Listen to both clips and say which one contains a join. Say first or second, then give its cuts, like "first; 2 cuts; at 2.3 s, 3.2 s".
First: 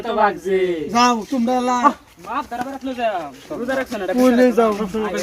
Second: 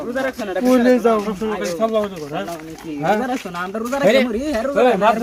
first; 1 cut; at 1.8 s